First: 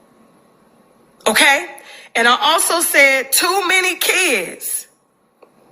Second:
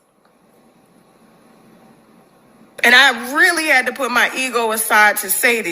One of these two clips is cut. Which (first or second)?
first